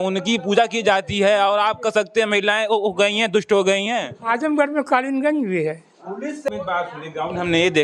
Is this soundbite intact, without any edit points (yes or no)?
no